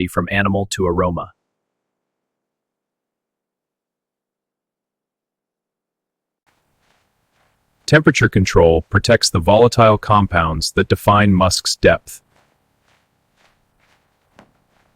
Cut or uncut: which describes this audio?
cut